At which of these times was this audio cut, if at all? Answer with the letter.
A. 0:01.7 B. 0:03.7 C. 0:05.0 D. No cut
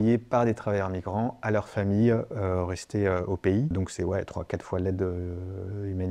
B